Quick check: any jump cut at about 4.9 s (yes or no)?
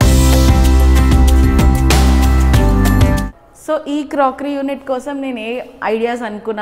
no